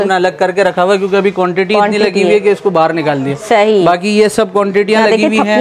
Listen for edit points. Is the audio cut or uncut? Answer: uncut